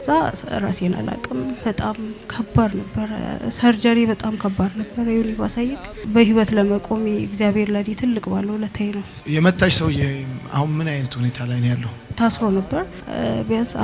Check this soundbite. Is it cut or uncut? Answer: cut